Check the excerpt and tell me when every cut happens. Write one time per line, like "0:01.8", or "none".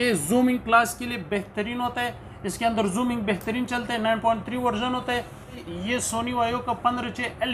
0:05.7